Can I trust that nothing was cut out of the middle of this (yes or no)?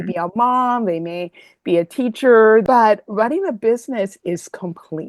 no